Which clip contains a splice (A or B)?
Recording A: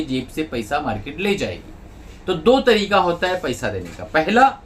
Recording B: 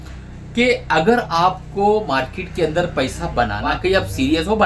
B